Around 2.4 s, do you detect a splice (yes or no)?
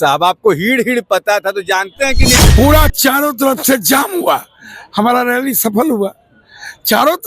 yes